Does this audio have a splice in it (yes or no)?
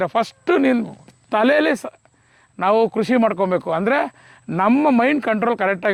no